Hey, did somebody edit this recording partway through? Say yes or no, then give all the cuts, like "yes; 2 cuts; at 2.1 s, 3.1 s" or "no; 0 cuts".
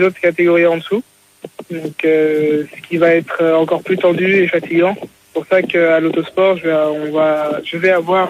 no; 0 cuts